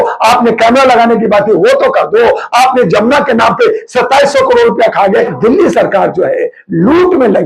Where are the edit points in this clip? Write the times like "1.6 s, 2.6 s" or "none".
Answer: 5.3 s